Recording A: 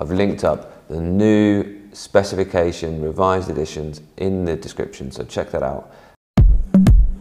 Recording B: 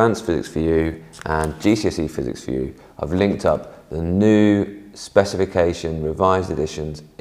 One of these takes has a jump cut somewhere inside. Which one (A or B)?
A